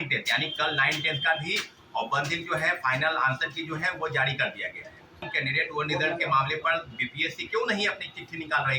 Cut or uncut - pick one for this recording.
cut